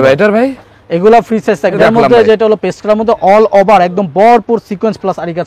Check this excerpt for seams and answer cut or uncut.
cut